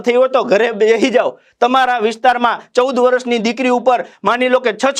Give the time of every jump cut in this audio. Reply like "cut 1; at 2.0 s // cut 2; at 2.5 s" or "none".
none